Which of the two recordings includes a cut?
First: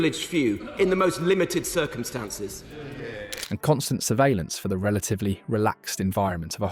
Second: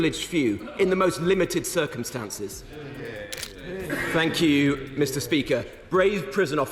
second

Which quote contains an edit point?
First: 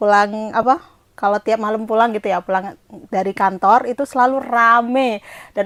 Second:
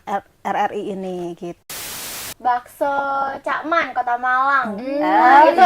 second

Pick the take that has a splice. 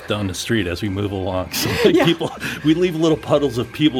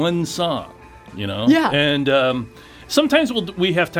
second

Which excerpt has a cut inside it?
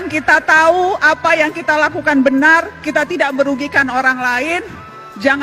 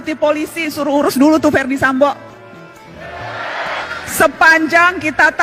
second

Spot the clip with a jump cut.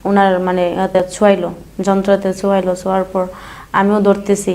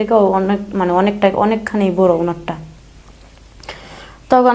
first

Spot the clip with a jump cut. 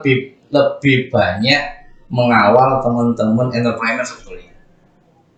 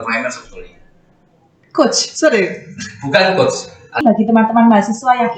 second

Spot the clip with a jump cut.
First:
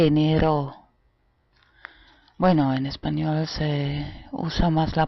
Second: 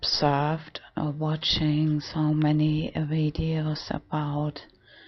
first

